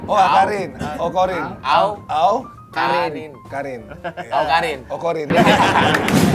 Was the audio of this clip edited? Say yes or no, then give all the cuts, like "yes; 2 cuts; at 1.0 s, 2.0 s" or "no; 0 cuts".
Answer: no; 0 cuts